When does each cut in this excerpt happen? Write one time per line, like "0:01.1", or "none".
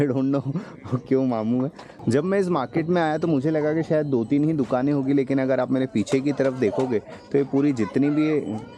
0:01.9